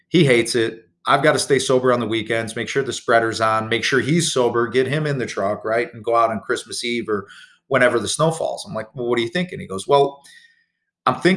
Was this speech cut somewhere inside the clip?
no; 0 cuts

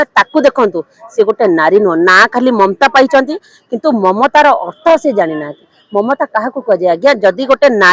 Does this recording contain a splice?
no; 0 cuts

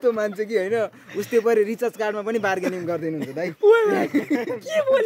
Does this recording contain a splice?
no; 0 cuts

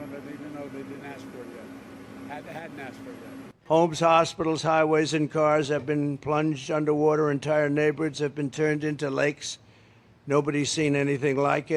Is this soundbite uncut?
no; 1 cut; at 3.6 s

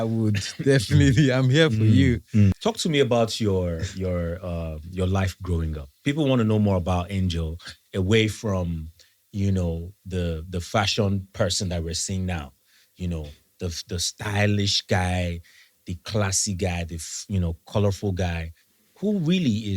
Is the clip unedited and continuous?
no; 1 cut; at 2.6 s

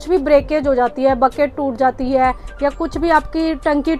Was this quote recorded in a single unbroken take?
yes; 0 cuts

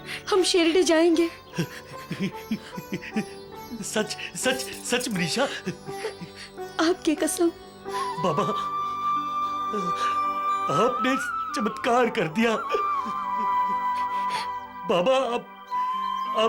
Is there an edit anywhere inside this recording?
no; 0 cuts

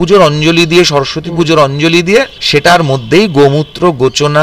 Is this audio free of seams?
no; 1 cut; at 2.4 s

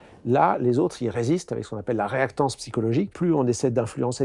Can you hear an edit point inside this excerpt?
yes; 1 cut; at 3.1 s

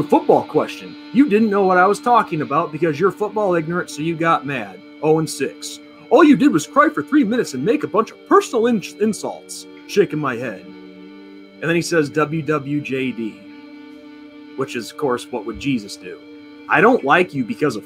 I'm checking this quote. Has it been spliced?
yes; 1 cut; at 16.6 s

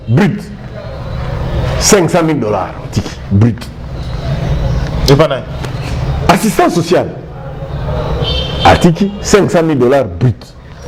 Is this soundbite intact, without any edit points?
yes; 0 cuts

